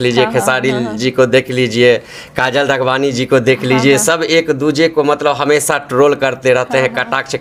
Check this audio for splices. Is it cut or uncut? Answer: uncut